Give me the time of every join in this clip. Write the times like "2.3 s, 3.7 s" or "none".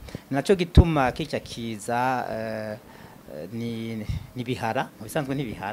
none